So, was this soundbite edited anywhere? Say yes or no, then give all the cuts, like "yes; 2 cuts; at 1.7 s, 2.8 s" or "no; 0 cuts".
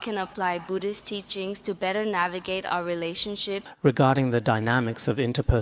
yes; 1 cut; at 3.6 s